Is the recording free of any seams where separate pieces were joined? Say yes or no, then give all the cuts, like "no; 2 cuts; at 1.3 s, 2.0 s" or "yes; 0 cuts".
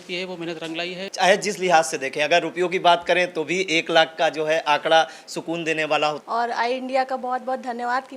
no; 2 cuts; at 1.0 s, 6.2 s